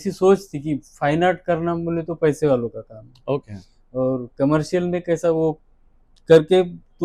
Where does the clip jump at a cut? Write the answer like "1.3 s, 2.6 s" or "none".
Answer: none